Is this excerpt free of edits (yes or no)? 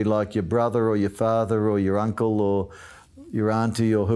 yes